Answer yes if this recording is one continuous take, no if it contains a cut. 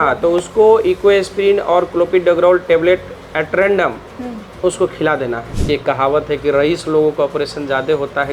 no